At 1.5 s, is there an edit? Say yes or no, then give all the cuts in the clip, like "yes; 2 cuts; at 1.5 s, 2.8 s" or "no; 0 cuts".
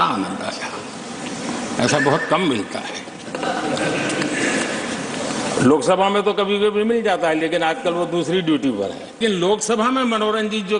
no; 1 cut; at 9.2 s